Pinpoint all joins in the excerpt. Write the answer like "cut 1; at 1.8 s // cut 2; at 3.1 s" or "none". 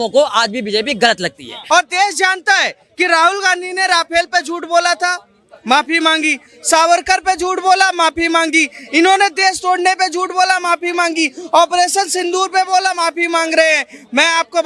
cut 1; at 1.5 s